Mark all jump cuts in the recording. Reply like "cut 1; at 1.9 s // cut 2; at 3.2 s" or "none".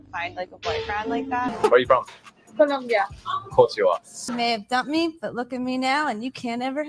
cut 1; at 1.5 s // cut 2; at 4.2 s